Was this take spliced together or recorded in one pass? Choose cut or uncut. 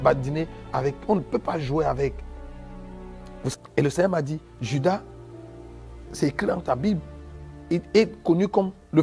cut